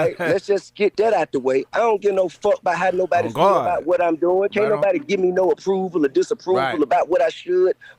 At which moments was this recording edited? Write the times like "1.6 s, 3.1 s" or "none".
none